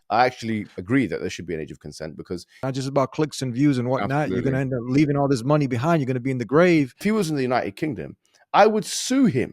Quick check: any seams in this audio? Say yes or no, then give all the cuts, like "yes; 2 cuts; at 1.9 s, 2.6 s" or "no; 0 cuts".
yes; 2 cuts; at 2.5 s, 7.0 s